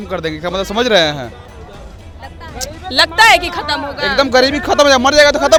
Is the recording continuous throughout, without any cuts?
yes; 0 cuts

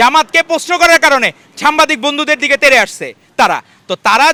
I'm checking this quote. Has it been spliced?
no; 0 cuts

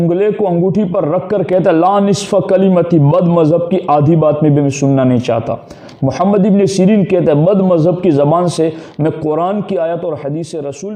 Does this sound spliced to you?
no; 0 cuts

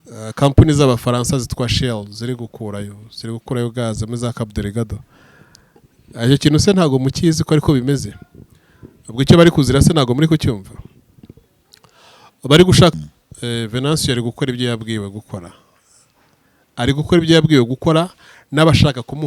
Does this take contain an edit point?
yes; 1 cut; at 12.9 s

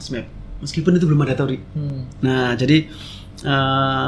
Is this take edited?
no; 0 cuts

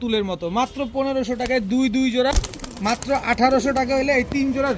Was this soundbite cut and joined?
yes; 1 cut; at 2.3 s

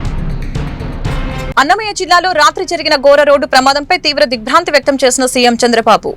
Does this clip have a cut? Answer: no; 0 cuts

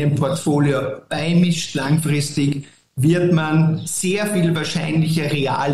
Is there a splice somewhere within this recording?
no; 0 cuts

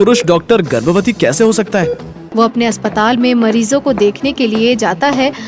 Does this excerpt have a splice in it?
yes; 1 cut; at 2.2 s

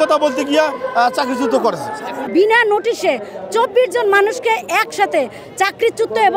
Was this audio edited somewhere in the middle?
yes; 1 cut; at 2.2 s

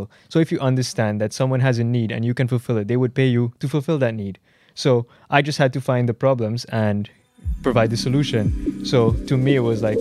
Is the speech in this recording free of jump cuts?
yes; 0 cuts

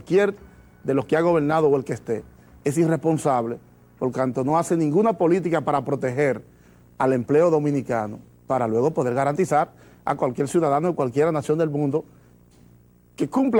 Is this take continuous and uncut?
yes; 0 cuts

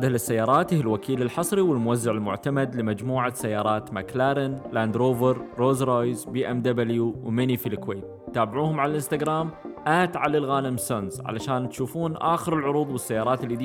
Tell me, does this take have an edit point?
no; 0 cuts

